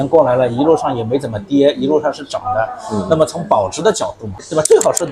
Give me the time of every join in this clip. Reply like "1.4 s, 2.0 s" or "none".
none